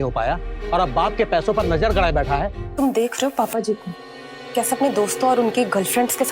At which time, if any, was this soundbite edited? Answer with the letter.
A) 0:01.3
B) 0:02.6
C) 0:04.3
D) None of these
B